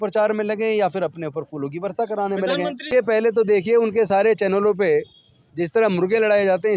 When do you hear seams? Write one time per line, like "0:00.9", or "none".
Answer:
0:02.9